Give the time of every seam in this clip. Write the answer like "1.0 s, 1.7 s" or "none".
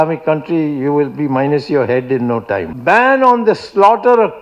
2.7 s